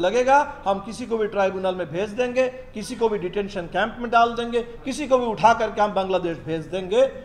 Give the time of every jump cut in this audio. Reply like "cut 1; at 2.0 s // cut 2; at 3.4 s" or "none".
none

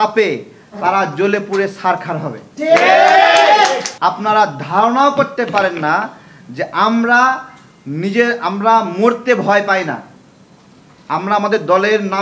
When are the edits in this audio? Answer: cut 1; at 3.9 s

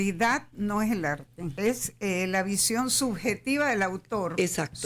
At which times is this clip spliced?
cut 1; at 1.4 s

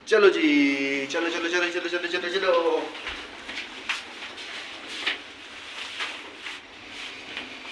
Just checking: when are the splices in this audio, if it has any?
none

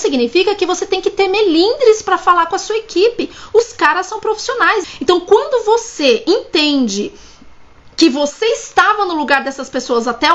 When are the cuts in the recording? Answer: cut 1; at 4.8 s

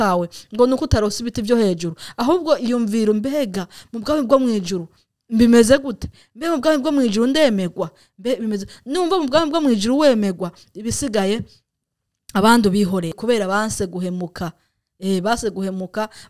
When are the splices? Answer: cut 1; at 13.1 s

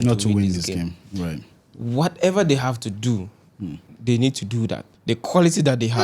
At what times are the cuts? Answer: cut 1; at 4.9 s

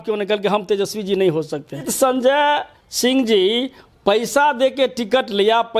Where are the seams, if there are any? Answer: cut 1; at 1.9 s

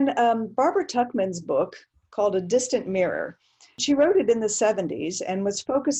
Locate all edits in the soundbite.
cut 1; at 3.8 s

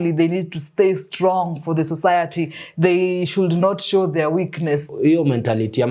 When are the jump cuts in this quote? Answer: cut 1; at 4.9 s

